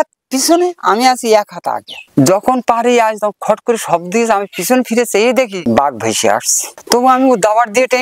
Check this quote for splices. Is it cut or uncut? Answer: cut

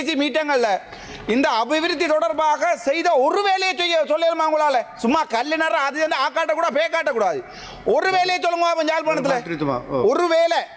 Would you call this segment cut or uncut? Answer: uncut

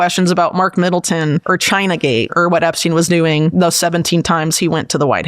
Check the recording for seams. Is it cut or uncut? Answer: cut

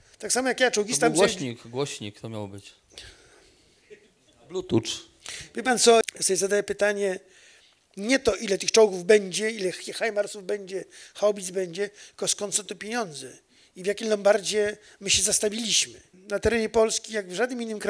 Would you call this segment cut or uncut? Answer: cut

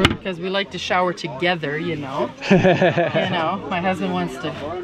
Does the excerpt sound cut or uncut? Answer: uncut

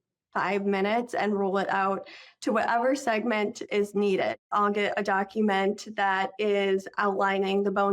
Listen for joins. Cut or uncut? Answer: cut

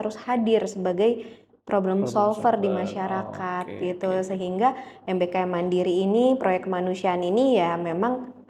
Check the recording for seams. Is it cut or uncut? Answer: uncut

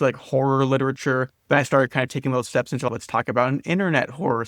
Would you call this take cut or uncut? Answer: cut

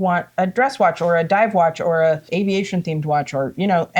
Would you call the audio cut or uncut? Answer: cut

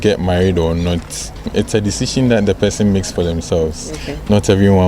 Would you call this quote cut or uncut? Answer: cut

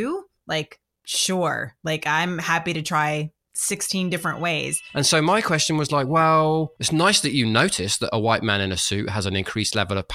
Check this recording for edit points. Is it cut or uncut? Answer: cut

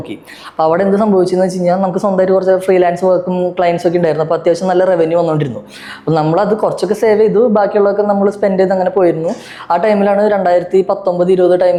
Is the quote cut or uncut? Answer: uncut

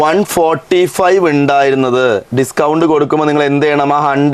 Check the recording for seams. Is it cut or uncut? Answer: uncut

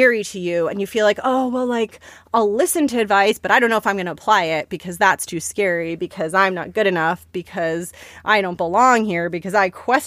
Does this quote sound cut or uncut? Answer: uncut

